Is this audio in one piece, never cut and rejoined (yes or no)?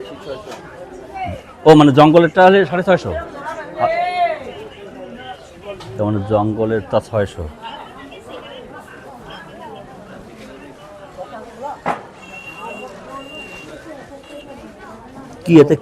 yes